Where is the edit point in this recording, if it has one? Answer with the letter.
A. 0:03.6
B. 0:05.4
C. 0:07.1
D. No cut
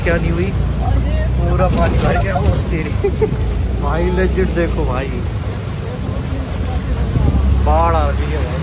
D